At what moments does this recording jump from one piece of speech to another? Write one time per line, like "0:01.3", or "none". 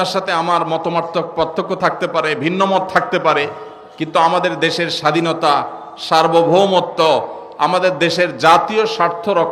none